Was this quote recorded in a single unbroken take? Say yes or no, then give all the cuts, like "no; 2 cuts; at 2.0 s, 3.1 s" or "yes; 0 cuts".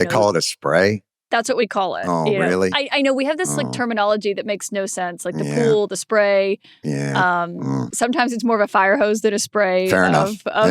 no; 1 cut; at 7.9 s